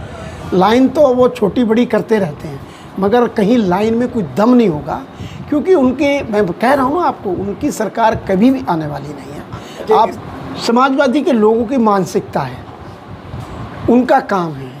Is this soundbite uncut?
no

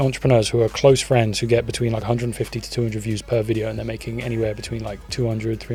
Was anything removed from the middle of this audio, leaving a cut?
no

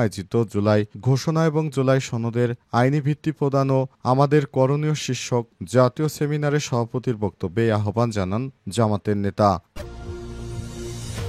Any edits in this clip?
yes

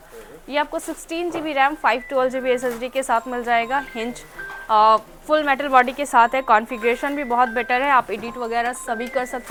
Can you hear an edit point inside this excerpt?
no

